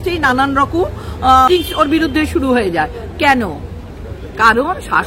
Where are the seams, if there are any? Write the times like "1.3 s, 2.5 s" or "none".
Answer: 1.5 s